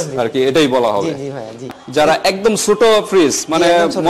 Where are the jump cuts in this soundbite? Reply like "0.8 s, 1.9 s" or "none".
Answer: 1.6 s